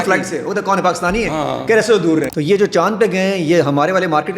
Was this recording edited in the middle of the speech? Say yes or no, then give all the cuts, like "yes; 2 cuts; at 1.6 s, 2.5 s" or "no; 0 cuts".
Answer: yes; 1 cut; at 2.3 s